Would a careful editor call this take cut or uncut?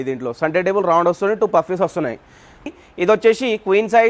cut